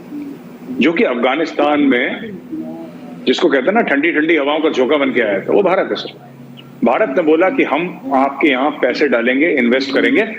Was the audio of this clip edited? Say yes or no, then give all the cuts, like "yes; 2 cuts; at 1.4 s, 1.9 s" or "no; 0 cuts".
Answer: no; 0 cuts